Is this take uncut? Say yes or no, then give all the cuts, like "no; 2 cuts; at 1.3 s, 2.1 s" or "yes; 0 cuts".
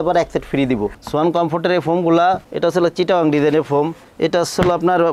no; 1 cut; at 1.0 s